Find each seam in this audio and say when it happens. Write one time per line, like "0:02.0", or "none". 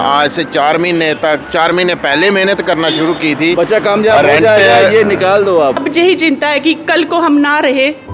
0:05.8